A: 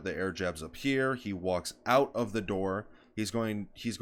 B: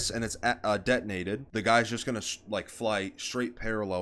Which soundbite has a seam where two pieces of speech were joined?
B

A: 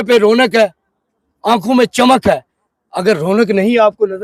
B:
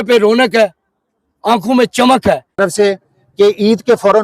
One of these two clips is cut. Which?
B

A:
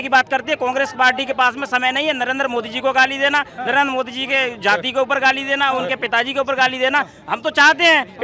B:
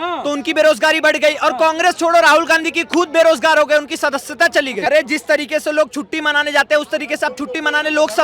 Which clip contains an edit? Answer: B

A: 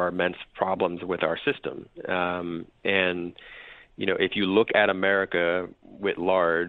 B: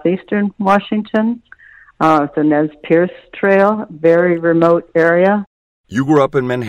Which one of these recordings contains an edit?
B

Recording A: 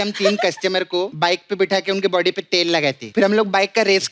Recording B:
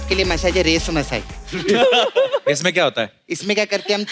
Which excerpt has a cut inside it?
A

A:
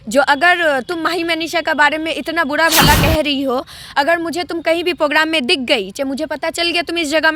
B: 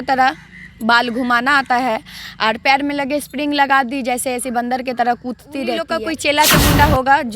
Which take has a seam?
B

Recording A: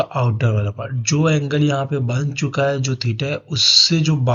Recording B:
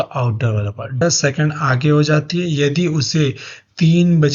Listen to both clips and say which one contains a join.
B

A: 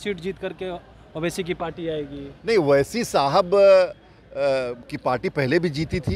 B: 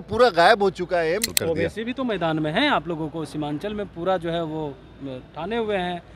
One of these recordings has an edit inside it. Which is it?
B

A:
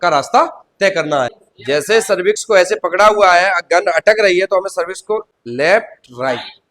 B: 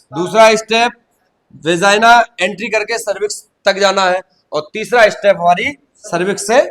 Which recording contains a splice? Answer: A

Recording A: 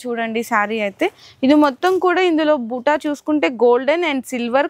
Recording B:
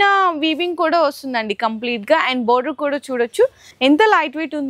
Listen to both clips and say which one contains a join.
B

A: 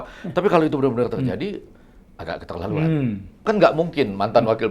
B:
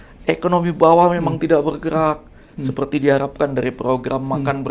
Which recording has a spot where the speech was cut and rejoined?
A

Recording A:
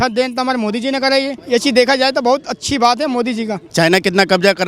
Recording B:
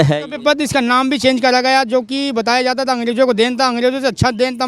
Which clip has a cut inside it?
A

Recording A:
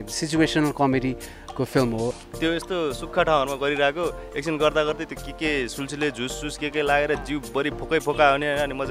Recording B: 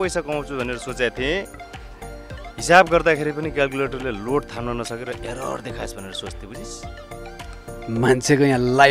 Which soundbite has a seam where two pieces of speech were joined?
A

